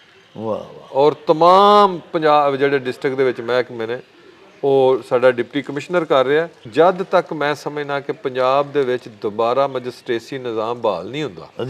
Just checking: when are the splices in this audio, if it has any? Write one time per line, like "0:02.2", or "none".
0:06.6